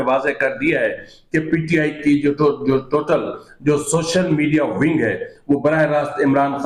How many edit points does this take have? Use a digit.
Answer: 0